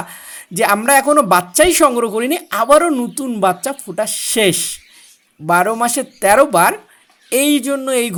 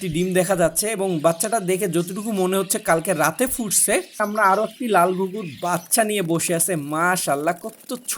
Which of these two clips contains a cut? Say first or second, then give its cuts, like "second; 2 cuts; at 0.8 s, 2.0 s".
second; 1 cut; at 4.2 s